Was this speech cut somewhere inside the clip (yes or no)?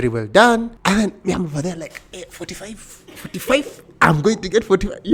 no